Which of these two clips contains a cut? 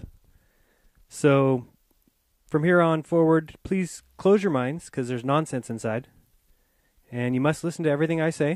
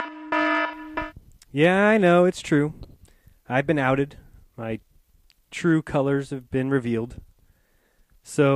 first; 1 cut; at 4.0 s

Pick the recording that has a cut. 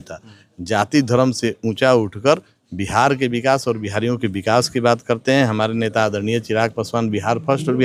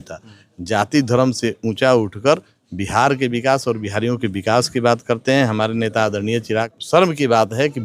second; 1 cut; at 6.7 s

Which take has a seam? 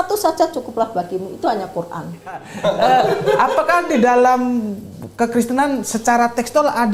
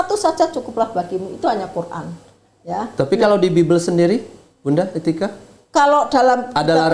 first; 1 cut; at 2.5 s

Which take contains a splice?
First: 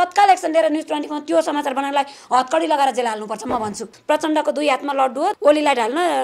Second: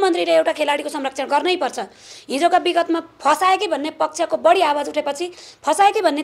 first; 2 cuts; at 3.9 s, 5.3 s

